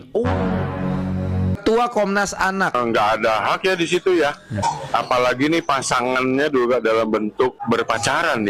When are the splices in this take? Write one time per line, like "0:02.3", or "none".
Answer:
0:01.6
0:04.6
0:07.6